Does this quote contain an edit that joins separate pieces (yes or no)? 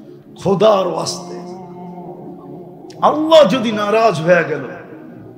yes